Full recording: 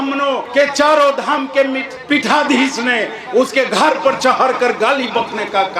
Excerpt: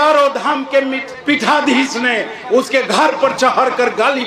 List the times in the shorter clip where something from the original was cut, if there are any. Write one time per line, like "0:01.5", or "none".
none